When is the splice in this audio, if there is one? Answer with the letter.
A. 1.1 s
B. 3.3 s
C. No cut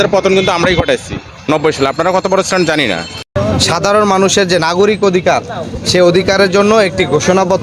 B